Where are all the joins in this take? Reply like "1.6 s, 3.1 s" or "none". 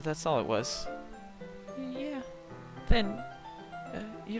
none